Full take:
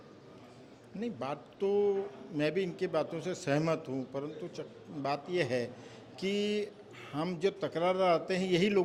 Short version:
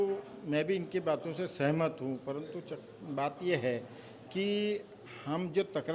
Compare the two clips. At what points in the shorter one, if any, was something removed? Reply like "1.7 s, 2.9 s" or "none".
none